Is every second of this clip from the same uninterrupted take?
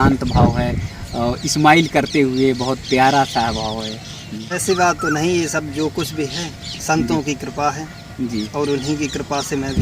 no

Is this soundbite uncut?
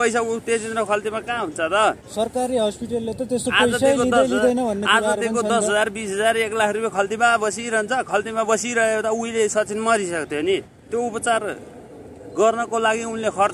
yes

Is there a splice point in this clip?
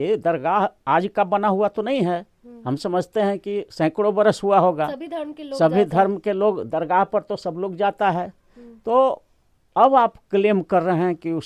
no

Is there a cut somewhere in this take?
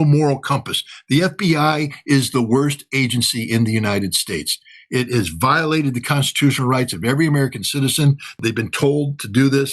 yes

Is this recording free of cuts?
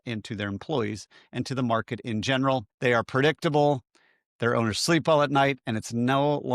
no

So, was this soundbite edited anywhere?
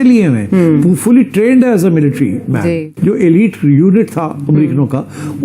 yes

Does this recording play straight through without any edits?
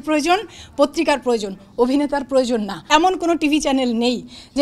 no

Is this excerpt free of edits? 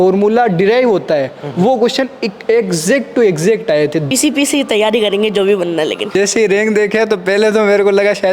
no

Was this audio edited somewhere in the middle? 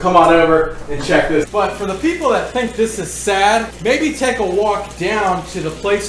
yes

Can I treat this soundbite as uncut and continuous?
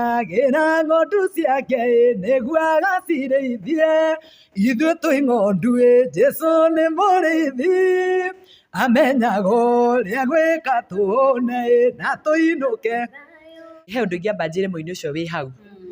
no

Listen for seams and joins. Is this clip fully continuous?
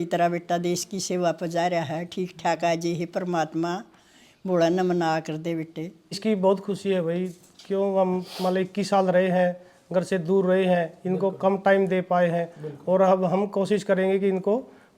no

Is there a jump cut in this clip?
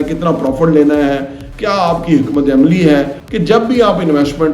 yes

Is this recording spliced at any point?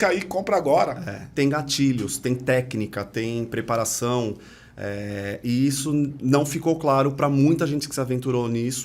yes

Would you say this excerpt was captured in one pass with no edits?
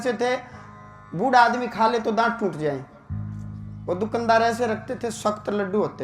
yes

